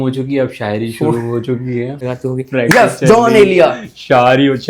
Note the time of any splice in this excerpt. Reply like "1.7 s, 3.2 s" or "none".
2.0 s